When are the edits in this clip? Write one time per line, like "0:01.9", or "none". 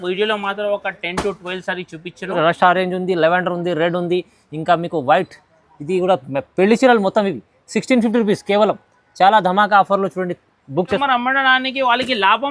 0:02.4
0:11.0